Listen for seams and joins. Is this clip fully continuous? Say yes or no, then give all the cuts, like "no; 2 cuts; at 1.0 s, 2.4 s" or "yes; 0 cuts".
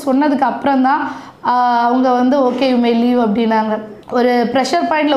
no; 1 cut; at 4.0 s